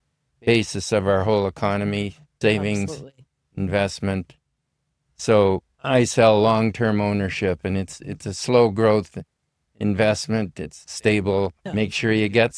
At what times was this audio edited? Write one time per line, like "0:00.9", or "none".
0:02.2
0:11.6